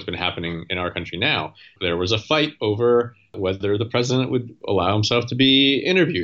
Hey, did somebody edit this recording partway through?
yes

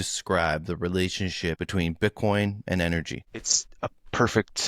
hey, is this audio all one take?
no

